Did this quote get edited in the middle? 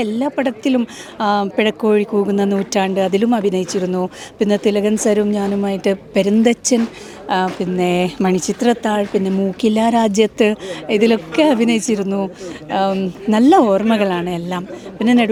no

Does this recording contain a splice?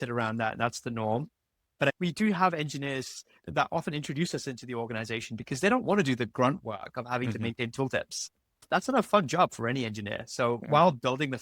yes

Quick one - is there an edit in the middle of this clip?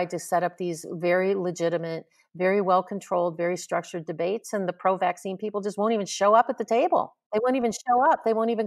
yes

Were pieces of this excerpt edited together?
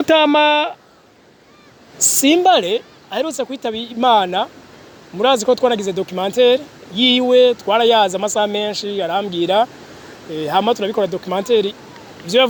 no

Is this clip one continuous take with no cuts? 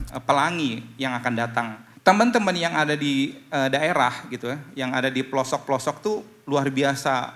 no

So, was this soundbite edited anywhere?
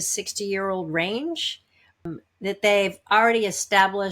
yes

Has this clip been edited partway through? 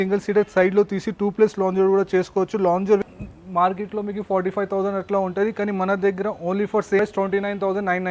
yes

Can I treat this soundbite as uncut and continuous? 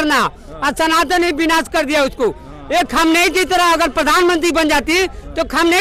yes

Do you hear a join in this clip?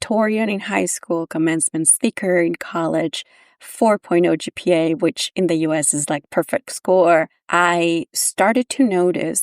yes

